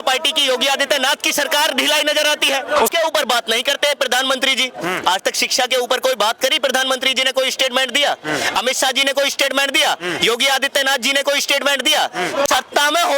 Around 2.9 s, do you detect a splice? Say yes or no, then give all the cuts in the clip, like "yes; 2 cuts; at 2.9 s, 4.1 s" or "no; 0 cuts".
yes; 2 cuts; at 2.9 s, 12.5 s